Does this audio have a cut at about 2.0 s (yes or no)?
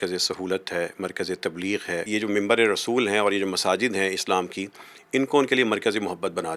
yes